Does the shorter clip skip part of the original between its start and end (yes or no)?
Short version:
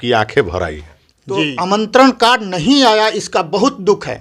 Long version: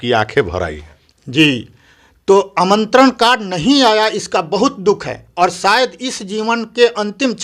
yes